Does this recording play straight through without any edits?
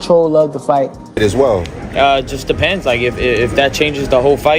no; 1 cut; at 1.2 s

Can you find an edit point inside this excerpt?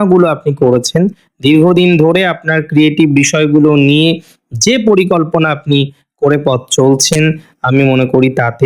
no; 0 cuts

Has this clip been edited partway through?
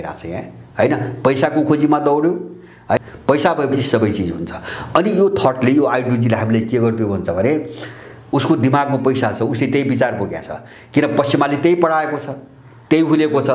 yes; 2 cuts; at 3.0 s, 8.2 s

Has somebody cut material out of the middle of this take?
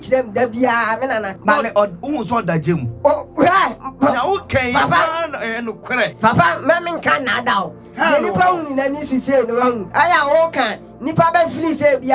yes; 3 cuts; at 1.3 s, 6.1 s, 9.8 s

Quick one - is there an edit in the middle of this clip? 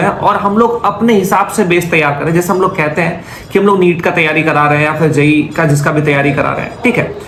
no; 0 cuts

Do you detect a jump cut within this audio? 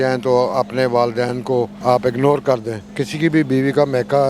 yes; 2 cuts; at 1.7 s, 2.9 s

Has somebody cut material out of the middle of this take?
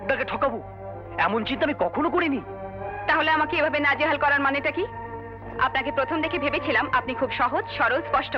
no; 0 cuts

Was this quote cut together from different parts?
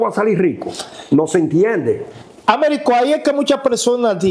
no; 0 cuts

